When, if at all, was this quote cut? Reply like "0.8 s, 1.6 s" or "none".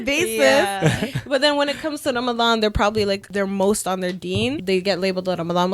3.3 s, 4.6 s